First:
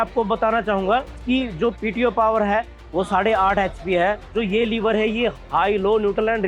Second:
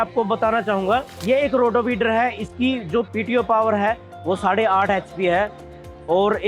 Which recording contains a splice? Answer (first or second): first